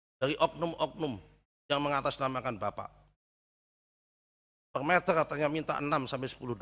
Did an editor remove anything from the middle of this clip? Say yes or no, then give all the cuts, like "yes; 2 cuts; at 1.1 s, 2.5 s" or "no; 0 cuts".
no; 0 cuts